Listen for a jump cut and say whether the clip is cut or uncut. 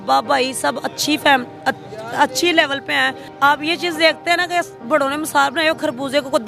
cut